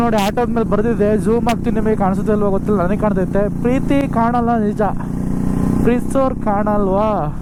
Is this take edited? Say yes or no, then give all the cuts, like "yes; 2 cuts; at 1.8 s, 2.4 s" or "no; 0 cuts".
no; 0 cuts